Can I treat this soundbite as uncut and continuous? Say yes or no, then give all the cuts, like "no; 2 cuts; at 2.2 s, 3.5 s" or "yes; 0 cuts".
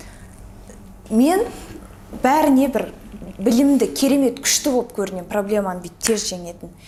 yes; 0 cuts